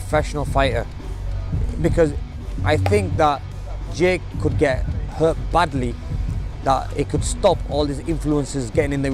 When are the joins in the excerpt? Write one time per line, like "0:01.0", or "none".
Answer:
none